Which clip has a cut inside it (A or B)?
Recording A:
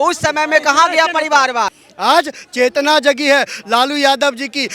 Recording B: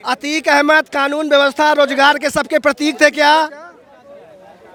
A